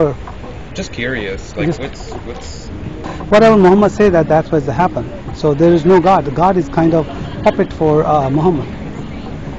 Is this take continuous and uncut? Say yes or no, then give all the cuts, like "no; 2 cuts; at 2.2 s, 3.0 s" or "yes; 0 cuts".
yes; 0 cuts